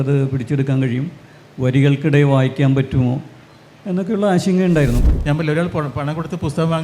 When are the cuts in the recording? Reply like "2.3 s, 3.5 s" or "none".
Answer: 5.0 s